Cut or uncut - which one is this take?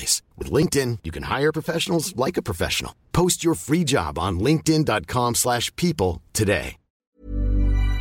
cut